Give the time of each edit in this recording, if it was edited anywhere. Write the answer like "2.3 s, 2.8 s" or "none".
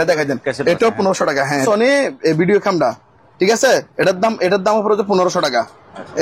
1.6 s

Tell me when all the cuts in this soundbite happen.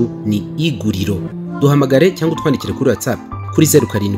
1.3 s

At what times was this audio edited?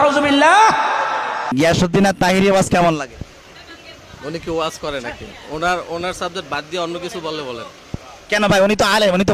1.5 s

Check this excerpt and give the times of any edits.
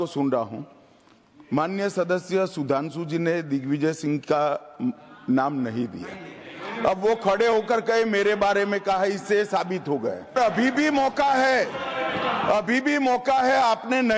10.4 s

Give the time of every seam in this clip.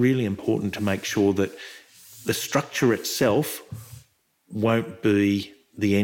none

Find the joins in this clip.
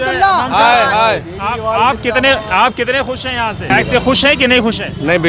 3.7 s

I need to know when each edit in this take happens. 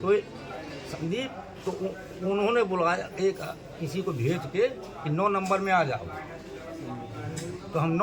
none

